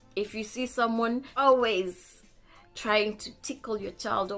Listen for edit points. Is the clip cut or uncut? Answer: cut